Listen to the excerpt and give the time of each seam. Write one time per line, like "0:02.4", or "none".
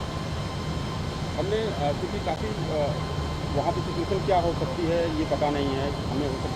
none